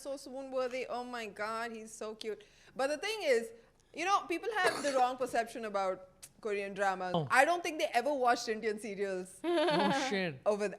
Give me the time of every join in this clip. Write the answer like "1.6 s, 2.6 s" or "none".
7.1 s